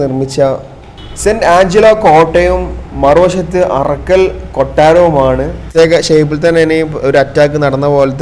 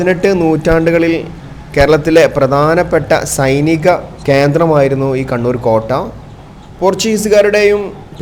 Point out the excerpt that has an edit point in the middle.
first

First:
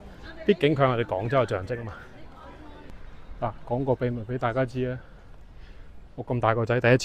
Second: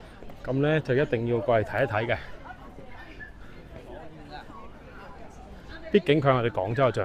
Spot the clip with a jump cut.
first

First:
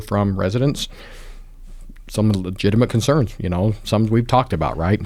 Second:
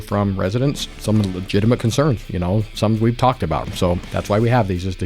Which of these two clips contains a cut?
second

